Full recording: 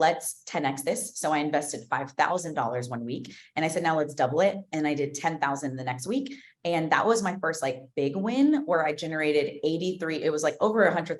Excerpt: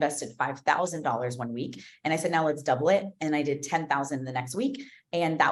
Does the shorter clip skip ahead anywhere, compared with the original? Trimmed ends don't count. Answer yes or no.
no